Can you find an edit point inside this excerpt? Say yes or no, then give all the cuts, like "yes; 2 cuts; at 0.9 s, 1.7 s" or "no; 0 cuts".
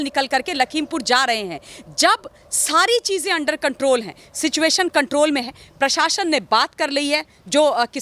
no; 0 cuts